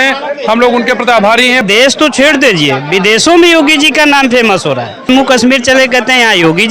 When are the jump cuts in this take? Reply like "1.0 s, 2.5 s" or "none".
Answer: 1.6 s, 5.1 s